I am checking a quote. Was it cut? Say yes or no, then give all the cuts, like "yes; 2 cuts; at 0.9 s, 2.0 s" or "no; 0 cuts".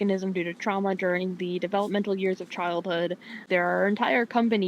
yes; 1 cut; at 3.4 s